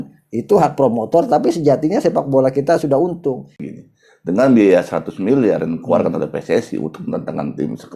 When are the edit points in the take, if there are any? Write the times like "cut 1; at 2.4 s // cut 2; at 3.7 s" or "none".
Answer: cut 1; at 3.6 s